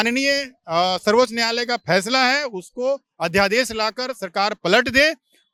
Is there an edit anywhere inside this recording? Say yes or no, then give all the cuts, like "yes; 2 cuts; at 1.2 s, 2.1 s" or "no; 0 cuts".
no; 0 cuts